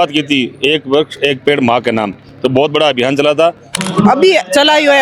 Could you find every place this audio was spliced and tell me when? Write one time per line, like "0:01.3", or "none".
0:03.7